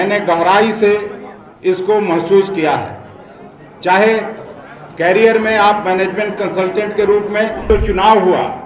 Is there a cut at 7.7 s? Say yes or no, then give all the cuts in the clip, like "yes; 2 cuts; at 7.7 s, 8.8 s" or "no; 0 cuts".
yes; 1 cut; at 7.7 s